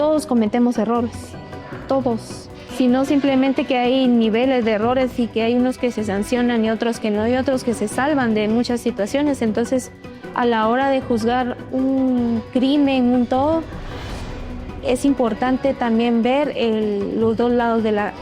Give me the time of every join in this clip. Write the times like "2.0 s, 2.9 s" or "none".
2.6 s